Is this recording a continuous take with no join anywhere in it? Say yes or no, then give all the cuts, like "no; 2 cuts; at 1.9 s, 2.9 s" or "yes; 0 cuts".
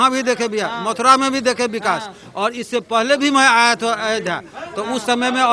yes; 0 cuts